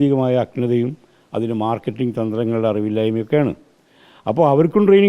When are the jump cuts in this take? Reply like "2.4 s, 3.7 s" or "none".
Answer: none